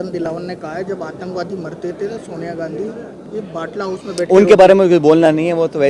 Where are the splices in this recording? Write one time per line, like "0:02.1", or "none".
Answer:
none

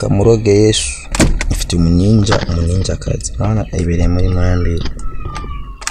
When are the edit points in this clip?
0:01.0

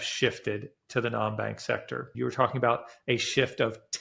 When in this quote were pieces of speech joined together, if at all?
0:02.1

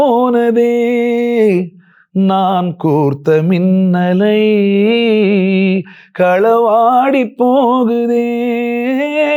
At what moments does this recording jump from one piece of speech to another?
none

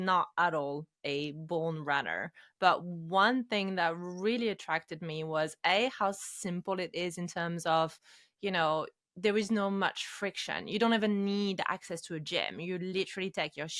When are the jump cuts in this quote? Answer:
none

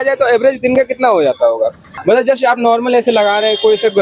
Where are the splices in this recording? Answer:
0:01.9

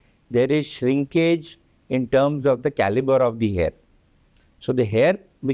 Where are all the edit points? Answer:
none

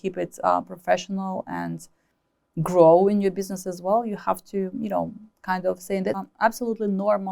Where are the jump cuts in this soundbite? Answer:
0:06.2

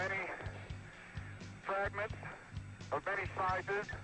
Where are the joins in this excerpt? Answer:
0:03.1

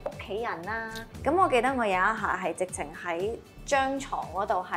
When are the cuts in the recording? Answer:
0:01.0

